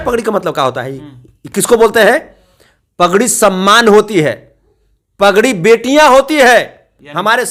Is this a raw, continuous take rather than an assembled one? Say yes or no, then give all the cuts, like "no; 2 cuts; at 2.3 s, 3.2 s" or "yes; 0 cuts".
yes; 0 cuts